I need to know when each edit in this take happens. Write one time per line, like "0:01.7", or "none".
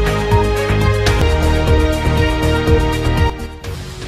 0:01.2